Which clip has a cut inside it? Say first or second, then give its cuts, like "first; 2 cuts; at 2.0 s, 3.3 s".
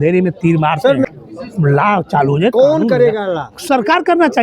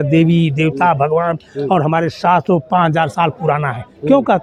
first; 1 cut; at 1.0 s